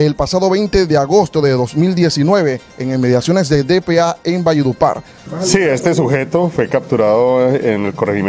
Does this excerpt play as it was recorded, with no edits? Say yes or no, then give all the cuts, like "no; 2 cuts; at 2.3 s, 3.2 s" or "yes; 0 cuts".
no; 1 cut; at 5.3 s